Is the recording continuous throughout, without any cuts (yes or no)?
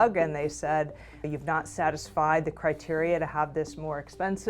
no